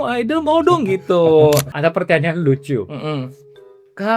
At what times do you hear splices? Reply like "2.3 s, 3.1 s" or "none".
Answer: 1.7 s